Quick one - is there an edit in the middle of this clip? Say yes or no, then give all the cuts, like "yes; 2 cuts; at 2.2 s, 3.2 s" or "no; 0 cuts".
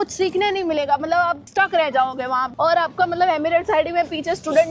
yes; 1 cut; at 2.5 s